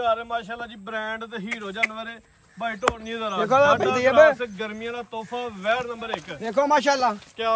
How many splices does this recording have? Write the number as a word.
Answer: zero